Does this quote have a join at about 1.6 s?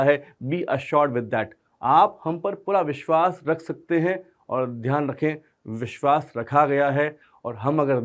yes; 1 cut; at 1.6 s

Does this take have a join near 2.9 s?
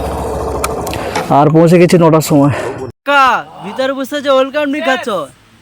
yes; 1 cut; at 2.9 s

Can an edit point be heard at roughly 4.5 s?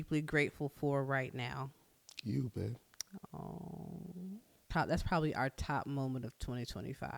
yes; 1 cut; at 4.5 s

